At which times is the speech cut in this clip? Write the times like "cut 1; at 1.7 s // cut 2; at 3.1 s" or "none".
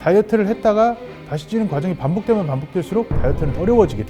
none

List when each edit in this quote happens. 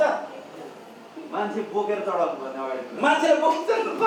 none

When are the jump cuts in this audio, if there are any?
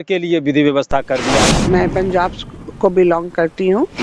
cut 1; at 1.6 s

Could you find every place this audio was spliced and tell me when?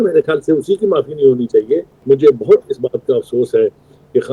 cut 1; at 1.9 s

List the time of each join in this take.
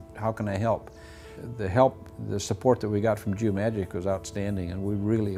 cut 1; at 1.4 s

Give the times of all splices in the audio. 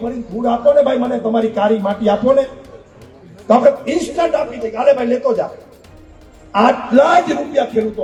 none

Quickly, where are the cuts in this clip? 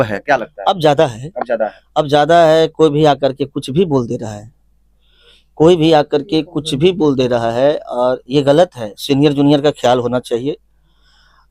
none

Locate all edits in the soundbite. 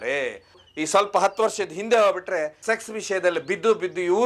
none

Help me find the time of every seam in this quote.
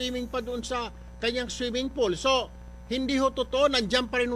cut 1; at 3.3 s

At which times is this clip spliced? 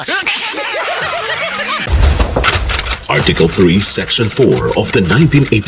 cut 1; at 1.9 s

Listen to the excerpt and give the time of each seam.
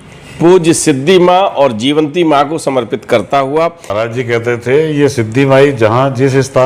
cut 1; at 3.9 s

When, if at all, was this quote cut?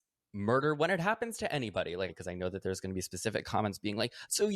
cut 1; at 2.1 s

